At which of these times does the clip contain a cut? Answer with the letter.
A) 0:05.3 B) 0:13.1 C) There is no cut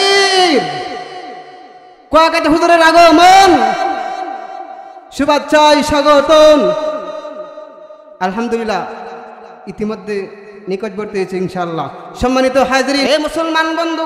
B